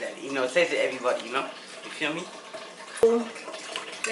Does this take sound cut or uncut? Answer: cut